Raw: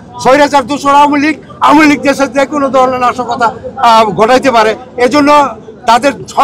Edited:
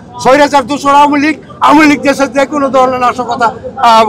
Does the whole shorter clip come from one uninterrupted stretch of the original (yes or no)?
yes